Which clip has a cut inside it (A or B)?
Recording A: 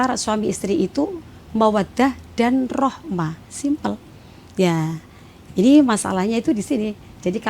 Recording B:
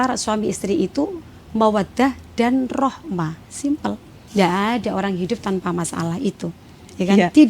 B